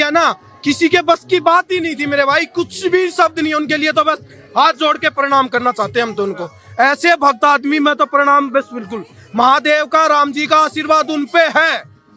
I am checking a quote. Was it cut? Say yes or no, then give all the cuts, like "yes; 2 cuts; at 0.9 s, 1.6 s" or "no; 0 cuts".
no; 0 cuts